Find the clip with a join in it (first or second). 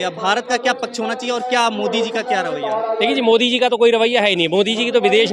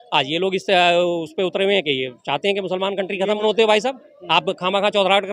second